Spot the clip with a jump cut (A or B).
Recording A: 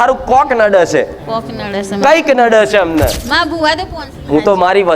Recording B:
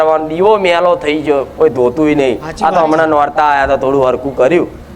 A